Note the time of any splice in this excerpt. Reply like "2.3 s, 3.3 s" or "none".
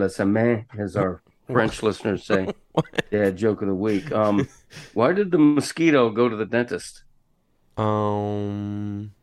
none